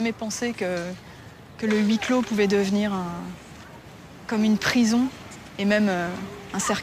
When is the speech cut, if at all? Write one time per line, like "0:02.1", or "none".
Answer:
none